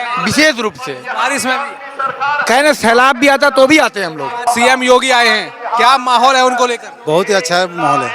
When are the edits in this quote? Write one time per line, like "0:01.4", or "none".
0:04.5